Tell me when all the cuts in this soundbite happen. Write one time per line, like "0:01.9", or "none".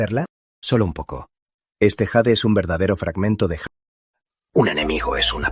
0:03.6